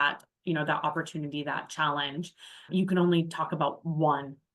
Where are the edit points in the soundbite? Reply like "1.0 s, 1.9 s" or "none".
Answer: 2.7 s